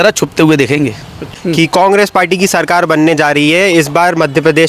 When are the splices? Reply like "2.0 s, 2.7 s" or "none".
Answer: 1.3 s